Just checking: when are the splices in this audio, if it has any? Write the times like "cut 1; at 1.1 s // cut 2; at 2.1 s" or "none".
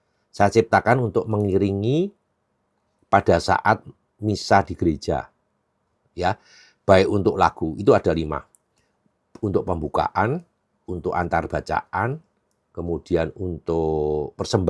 none